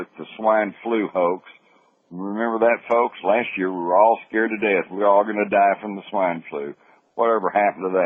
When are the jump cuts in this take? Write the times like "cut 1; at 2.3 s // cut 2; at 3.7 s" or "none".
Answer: none